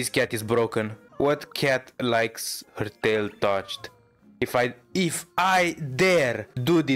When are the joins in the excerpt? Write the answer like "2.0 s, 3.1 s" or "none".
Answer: none